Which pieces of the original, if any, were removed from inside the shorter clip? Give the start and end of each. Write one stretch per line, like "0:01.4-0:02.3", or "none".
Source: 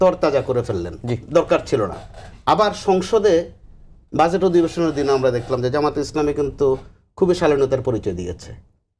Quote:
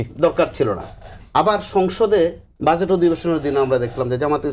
0:03.6-0:04.0

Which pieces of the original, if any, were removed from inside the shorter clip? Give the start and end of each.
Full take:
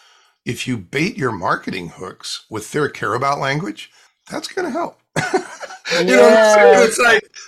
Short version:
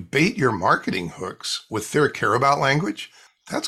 none

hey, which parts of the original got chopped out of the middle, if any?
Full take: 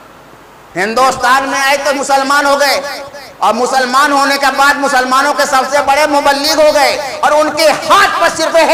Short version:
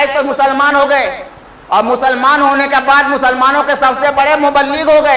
none

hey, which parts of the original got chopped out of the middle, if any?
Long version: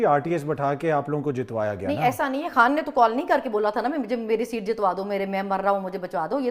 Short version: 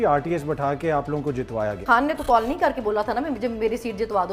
0:01.8-0:02.5

